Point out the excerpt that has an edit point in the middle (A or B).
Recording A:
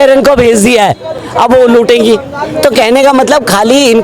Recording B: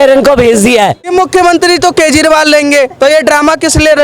B